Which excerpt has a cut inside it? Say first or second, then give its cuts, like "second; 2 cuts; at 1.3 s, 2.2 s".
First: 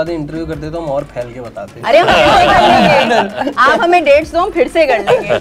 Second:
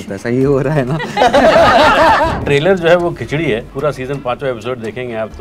second; 2 cuts; at 2.3 s, 3.7 s